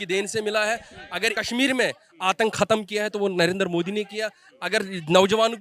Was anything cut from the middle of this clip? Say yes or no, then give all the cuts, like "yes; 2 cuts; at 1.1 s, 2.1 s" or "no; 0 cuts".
no; 0 cuts